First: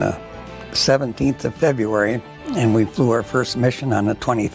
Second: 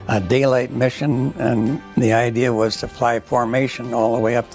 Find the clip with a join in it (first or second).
second